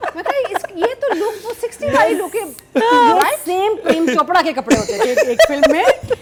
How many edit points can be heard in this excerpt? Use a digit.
0